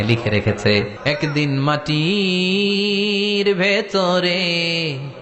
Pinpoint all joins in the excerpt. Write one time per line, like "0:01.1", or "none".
0:00.9